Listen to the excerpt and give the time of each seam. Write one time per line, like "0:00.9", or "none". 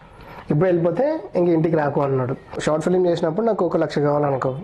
0:02.6